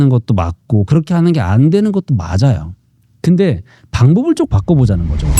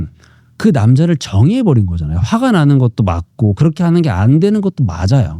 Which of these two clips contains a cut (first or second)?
first